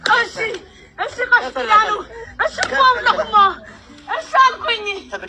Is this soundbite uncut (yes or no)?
yes